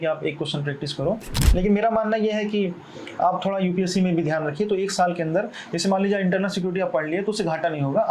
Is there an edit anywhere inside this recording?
yes; 1 cut; at 1.4 s

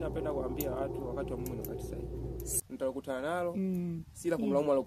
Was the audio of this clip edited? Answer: yes; 1 cut; at 2.5 s

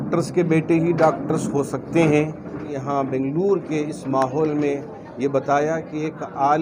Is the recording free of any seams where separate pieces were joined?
no; 1 cut; at 2.7 s

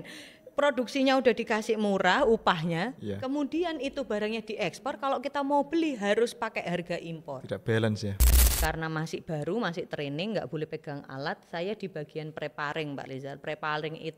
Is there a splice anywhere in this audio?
yes; 1 cut; at 8.2 s

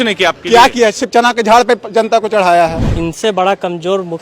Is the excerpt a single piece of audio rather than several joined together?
no; 1 cut; at 2.9 s

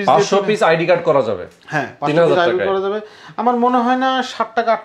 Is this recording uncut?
yes; 0 cuts

